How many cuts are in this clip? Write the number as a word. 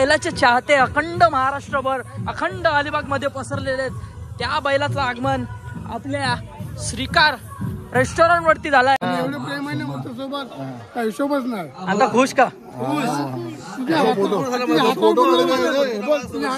one